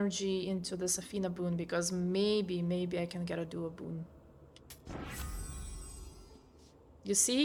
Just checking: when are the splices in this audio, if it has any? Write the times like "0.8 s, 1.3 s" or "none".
none